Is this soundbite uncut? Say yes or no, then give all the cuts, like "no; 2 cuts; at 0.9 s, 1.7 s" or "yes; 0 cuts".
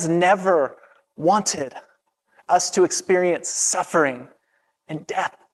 yes; 0 cuts